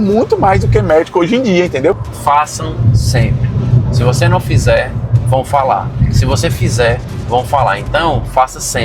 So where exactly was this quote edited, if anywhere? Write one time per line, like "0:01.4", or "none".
0:02.1